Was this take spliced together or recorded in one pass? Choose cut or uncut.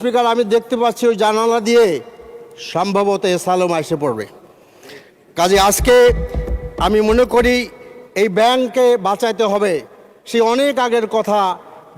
uncut